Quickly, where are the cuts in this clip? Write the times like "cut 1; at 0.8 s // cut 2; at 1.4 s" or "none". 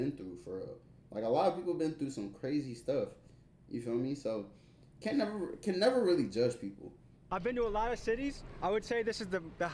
cut 1; at 7.3 s